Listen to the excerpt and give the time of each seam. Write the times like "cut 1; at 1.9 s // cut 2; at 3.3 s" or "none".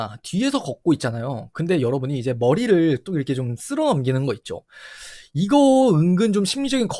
none